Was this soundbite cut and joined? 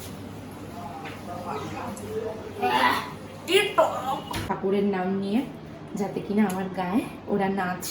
yes; 1 cut; at 4.5 s

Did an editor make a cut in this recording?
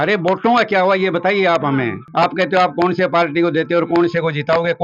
no; 0 cuts

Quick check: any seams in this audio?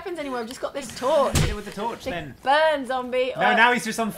yes; 1 cut; at 2.3 s

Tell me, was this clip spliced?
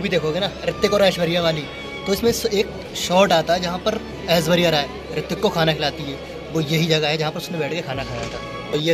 no; 0 cuts

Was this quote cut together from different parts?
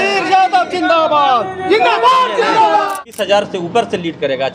yes; 1 cut; at 3.0 s

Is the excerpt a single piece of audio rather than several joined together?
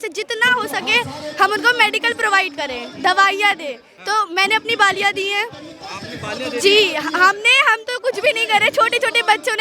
yes; 0 cuts

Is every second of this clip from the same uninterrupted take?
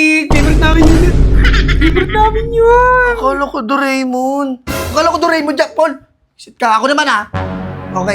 yes; 0 cuts

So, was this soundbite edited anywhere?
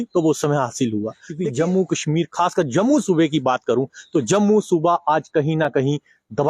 yes; 1 cut; at 1.2 s

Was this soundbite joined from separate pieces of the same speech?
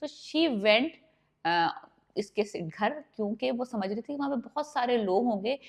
no; 0 cuts

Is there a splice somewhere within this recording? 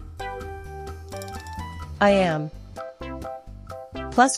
no; 0 cuts

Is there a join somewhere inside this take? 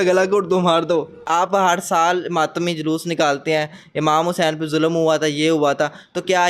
yes; 1 cut; at 1.2 s

